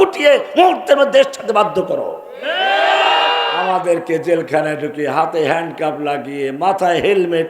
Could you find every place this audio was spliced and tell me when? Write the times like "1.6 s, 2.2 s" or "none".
3.5 s